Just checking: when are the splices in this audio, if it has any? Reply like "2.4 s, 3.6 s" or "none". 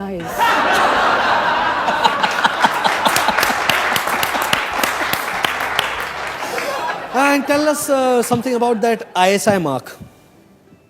6.4 s

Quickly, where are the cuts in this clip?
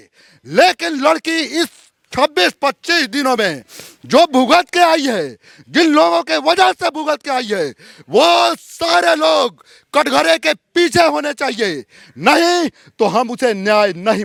none

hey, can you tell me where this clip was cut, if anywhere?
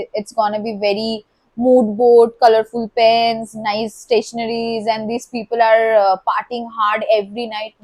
none

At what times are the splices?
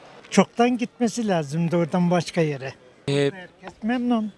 none

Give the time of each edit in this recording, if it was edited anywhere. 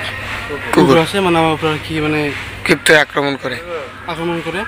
none

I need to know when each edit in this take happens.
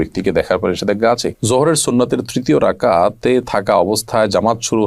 1.3 s

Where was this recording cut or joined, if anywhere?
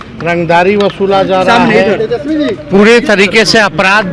none

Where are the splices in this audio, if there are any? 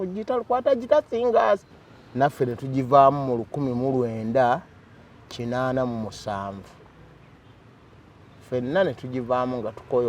1.7 s

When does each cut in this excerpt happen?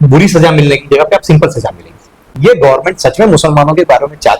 2.3 s

